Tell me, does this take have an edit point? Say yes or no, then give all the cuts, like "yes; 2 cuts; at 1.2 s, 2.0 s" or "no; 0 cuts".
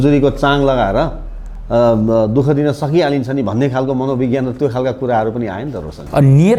no; 0 cuts